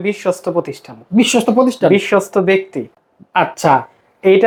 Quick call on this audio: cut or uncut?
uncut